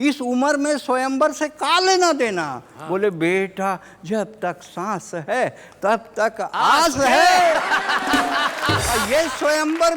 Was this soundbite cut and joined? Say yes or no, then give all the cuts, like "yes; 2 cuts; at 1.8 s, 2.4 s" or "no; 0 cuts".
yes; 1 cut; at 8.9 s